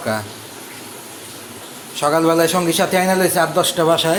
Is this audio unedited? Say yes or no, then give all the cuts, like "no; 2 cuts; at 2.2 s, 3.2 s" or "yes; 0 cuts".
yes; 0 cuts